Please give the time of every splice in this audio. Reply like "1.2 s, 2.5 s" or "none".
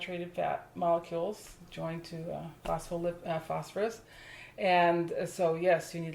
none